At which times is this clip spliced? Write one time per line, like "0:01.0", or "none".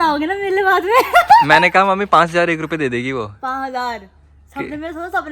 none

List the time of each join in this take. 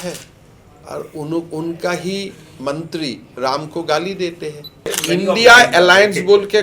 0:05.0

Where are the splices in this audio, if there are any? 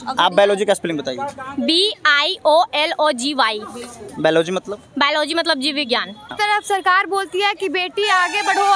0:06.3

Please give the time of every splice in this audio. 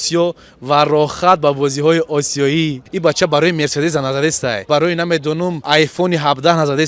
0:02.8
0:04.7
0:05.6

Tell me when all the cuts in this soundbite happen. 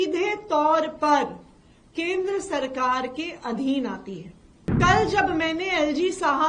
0:04.8

